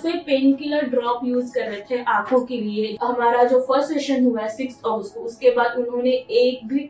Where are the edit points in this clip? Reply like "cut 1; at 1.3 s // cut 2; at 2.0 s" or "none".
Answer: cut 1; at 2.9 s